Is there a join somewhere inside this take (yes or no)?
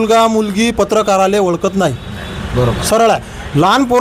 no